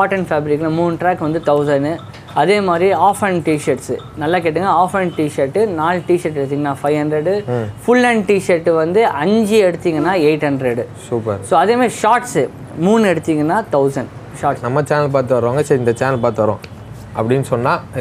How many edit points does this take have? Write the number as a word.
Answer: one